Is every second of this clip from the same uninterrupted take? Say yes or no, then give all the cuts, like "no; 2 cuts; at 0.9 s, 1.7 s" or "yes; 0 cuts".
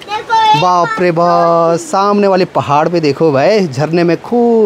yes; 0 cuts